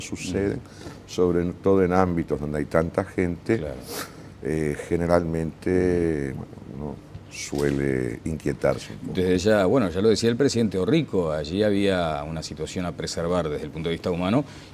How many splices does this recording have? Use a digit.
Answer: 1